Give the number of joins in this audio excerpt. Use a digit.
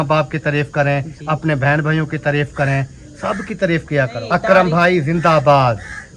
1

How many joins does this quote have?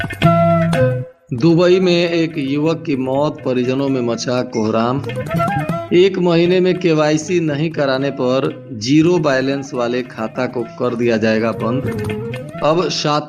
1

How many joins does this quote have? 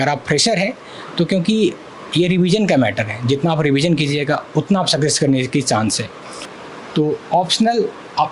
1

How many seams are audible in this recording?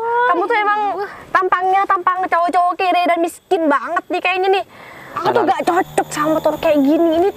1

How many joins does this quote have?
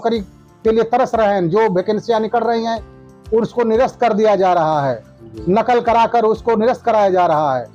0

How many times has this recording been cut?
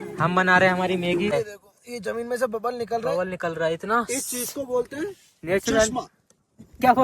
1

